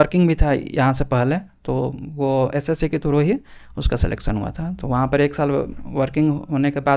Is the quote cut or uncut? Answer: uncut